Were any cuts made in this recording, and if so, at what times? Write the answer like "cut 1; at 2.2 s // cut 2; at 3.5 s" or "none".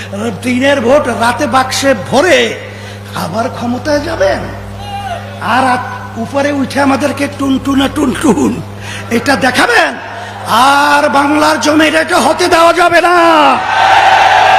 none